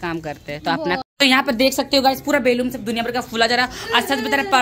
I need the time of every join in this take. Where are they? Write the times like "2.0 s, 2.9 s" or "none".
1.0 s